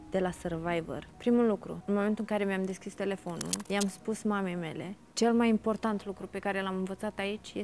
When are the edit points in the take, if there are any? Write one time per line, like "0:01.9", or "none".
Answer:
0:01.1
0:01.7
0:03.6
0:05.1